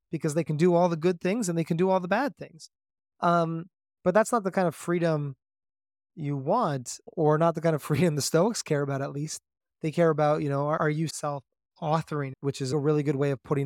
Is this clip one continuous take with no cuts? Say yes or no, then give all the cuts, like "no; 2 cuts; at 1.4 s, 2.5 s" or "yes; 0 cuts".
no; 3 cuts; at 7.0 s, 10.9 s, 12.7 s